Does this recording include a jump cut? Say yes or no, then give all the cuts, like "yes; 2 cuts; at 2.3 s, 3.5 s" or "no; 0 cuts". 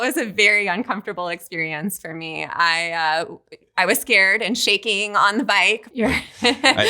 yes; 1 cut; at 5.9 s